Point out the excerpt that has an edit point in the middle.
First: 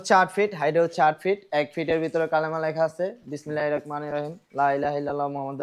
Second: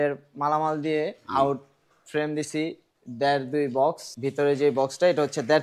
second; 1 cut; at 4.1 s

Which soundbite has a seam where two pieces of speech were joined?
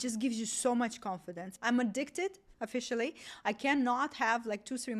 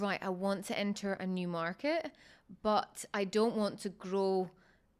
first; 1 cut; at 1.4 s

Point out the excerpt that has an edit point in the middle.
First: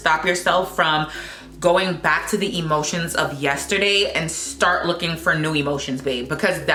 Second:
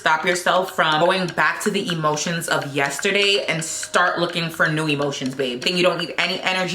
second; 2 cuts; at 1.0 s, 5.6 s

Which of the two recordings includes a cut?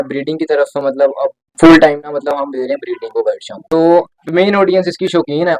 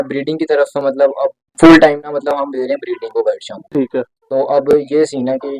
first; 1 cut; at 3.5 s

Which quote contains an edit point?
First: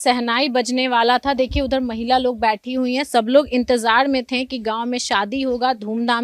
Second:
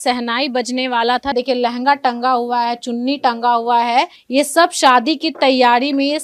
second; 2 cuts; at 1.3 s, 4.2 s

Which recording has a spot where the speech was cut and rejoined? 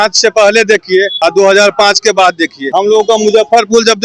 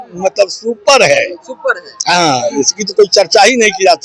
first; 2 cuts; at 1.1 s, 2.5 s

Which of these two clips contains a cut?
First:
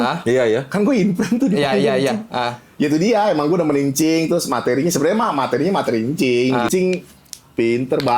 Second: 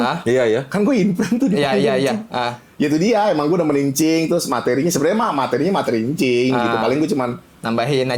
first; 1 cut; at 6.7 s

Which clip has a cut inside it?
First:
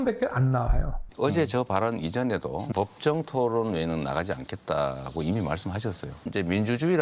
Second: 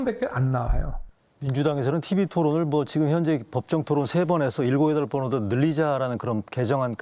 first; 3 cuts; at 1.1 s, 2.7 s, 6.3 s

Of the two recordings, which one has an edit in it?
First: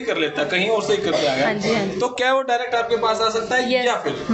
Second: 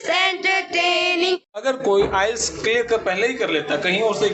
second; 1 cut; at 1.6 s

